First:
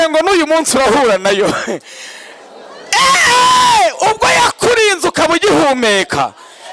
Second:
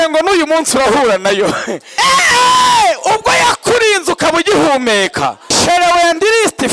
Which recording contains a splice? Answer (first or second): second